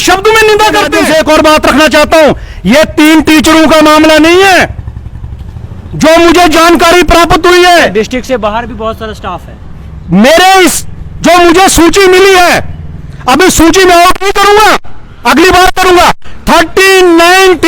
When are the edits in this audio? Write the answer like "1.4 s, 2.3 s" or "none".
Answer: 0.9 s